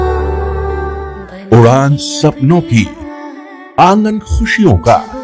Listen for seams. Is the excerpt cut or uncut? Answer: uncut